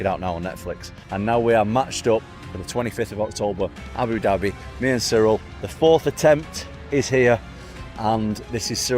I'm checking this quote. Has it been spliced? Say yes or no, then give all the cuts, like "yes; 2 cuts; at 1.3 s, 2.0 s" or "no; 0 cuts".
yes; 1 cut; at 1.0 s